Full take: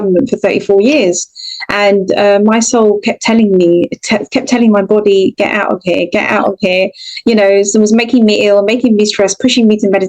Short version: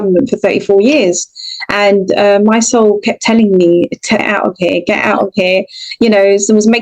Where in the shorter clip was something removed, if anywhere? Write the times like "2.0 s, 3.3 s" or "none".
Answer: 4.3 s